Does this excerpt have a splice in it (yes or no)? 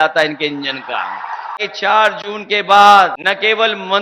yes